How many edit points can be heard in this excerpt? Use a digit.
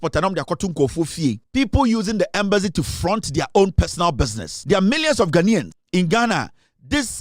3